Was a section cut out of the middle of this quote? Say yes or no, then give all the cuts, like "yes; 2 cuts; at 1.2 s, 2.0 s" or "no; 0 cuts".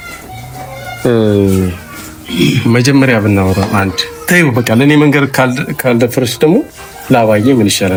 no; 0 cuts